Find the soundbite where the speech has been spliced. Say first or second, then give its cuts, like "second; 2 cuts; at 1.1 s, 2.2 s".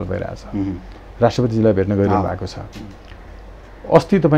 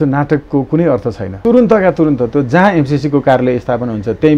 second; 1 cut; at 1.4 s